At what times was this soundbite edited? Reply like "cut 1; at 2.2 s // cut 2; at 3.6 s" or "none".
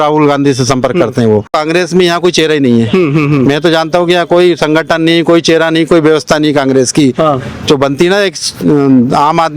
cut 1; at 1.5 s